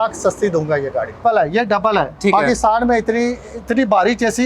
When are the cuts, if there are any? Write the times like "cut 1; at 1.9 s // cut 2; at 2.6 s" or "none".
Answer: cut 1; at 1.2 s

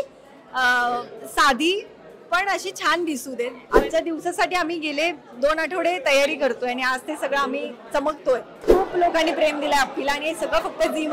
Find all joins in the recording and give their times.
cut 1; at 3.6 s // cut 2; at 8.5 s

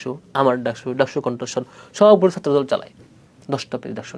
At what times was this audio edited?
none

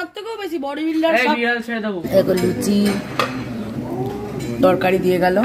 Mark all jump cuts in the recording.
cut 1; at 2.0 s

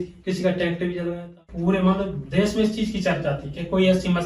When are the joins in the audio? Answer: cut 1; at 1.4 s

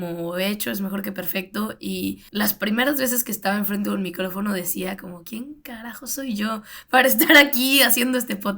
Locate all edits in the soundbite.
cut 1; at 2.2 s

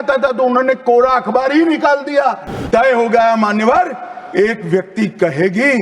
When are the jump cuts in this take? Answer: cut 1; at 2.6 s

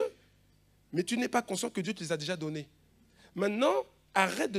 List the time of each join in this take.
none

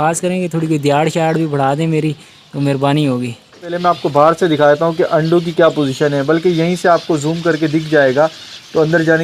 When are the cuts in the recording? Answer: cut 1; at 3.7 s

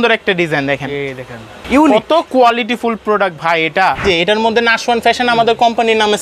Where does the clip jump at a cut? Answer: cut 1; at 1.6 s // cut 2; at 4.0 s

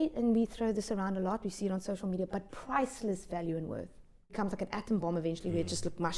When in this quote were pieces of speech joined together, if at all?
cut 1; at 4.4 s

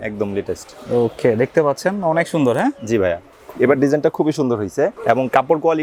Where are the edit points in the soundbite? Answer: none

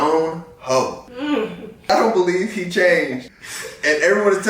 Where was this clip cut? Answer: cut 1; at 1.4 s

